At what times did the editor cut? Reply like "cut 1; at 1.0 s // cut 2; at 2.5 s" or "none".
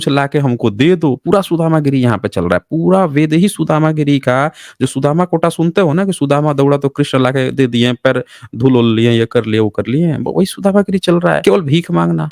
cut 1; at 11.4 s